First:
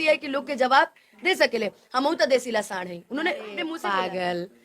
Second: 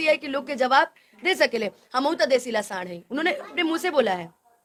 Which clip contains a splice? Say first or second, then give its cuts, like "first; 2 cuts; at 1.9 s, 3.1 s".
first; 1 cut; at 3.7 s